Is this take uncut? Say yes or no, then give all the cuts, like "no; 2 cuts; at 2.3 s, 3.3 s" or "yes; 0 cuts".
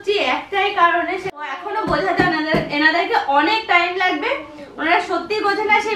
no; 1 cut; at 1.5 s